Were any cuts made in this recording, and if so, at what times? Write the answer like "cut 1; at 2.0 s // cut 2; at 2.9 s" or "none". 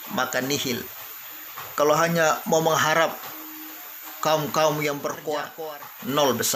cut 1; at 5.5 s